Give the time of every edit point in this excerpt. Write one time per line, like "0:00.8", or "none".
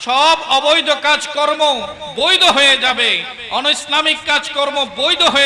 none